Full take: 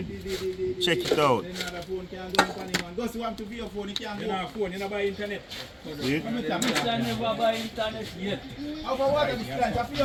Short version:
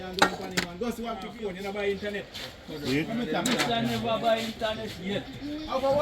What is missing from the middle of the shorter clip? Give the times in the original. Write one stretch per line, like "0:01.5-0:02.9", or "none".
0:03.5-0:04.5